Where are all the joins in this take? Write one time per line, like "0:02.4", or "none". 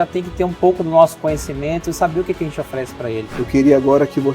0:03.3